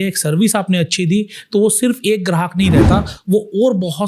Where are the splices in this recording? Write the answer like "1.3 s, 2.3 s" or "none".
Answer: none